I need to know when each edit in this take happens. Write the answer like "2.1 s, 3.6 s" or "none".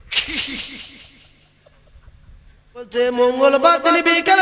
2.9 s

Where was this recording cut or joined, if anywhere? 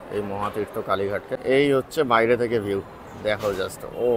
1.3 s

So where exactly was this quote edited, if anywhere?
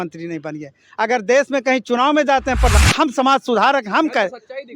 2.8 s

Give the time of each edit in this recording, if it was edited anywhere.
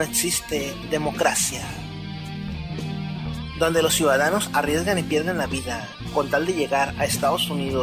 none

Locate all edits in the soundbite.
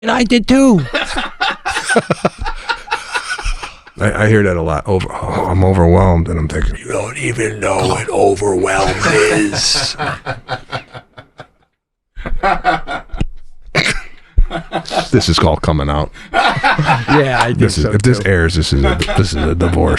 3.8 s, 6.7 s

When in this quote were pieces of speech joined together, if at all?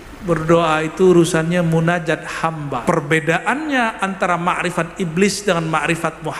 2.8 s

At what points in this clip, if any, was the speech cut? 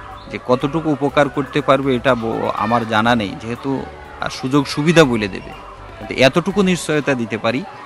none

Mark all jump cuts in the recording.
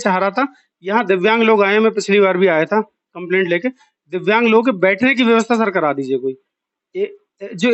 none

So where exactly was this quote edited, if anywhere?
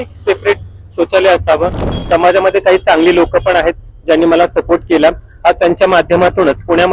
1.9 s

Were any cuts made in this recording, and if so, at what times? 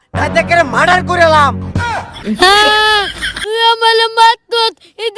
2.2 s

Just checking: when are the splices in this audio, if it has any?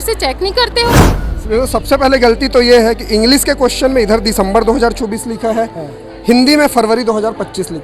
1.0 s

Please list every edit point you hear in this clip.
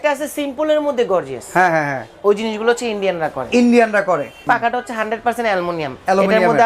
4.4 s

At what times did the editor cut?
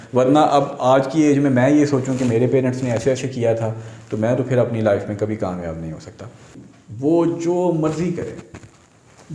6.6 s

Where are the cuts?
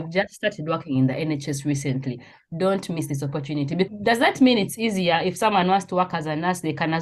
3.9 s

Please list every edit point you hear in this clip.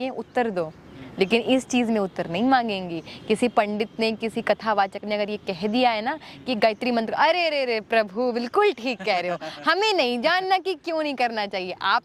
none

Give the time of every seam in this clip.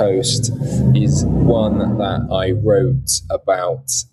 none

